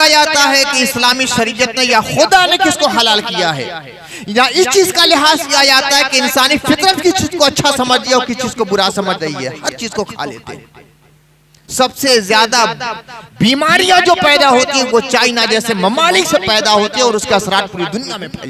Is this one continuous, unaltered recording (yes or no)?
yes